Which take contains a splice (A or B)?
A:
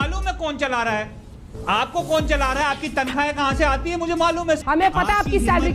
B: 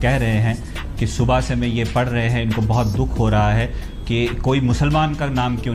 A